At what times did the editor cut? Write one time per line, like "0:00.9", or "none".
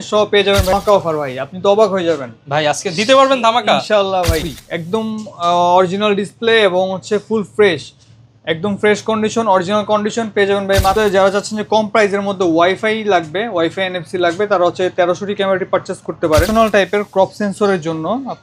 0:00.7
0:04.5
0:10.9
0:16.5